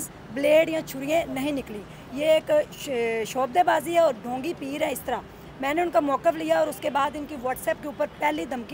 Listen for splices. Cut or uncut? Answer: uncut